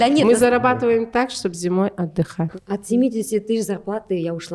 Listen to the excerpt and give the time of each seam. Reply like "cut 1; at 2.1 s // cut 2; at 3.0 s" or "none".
cut 1; at 2.5 s